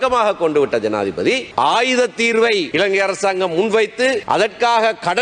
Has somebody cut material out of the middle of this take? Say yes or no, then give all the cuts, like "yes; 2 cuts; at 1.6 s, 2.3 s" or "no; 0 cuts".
yes; 3 cuts; at 1.5 s, 2.7 s, 4.2 s